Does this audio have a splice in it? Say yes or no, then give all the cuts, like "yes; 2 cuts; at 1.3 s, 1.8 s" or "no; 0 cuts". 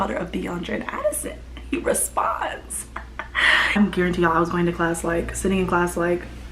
yes; 1 cut; at 3.8 s